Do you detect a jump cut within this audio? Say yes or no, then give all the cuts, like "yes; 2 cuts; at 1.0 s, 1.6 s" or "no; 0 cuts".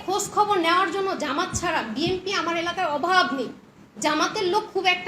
no; 0 cuts